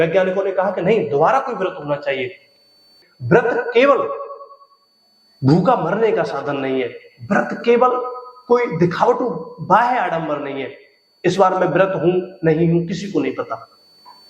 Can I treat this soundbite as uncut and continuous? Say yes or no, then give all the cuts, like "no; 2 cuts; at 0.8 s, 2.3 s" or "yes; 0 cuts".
no; 1 cut; at 3.1 s